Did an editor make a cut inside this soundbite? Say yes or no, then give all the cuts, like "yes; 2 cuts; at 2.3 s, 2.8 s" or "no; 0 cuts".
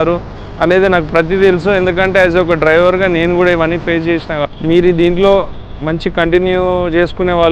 yes; 1 cut; at 4.4 s